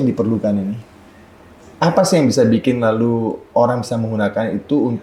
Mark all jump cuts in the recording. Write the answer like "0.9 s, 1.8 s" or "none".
none